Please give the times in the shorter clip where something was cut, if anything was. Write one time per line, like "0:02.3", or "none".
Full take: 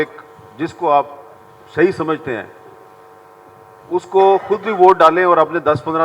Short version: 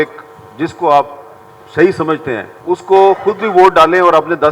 0:02.5